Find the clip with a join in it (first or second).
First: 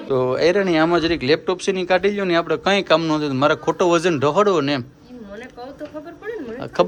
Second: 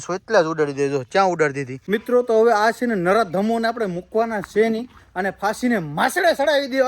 second